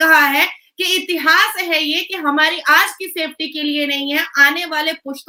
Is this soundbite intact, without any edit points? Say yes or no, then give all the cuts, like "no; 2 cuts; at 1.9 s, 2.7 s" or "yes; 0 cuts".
yes; 0 cuts